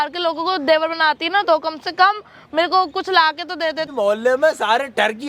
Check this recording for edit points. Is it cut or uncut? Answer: cut